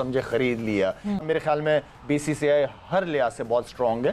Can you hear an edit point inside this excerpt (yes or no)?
yes